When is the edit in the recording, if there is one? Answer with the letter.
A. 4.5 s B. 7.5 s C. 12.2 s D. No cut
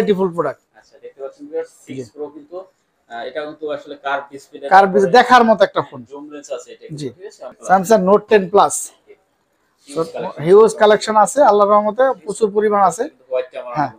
B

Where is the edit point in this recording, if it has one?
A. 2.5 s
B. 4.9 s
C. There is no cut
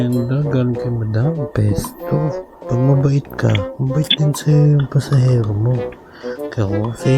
A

